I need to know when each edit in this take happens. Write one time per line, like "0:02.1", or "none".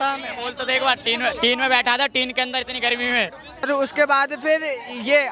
0:03.7